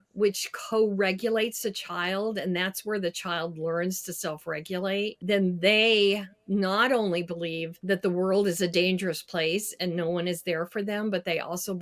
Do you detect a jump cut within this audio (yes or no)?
yes